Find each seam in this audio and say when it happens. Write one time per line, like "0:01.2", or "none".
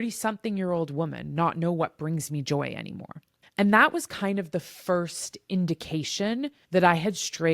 0:06.6